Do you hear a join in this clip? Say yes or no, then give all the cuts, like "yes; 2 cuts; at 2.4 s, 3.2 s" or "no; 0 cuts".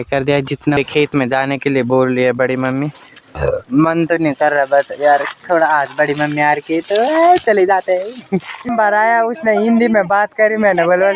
yes; 2 cuts; at 0.8 s, 8.7 s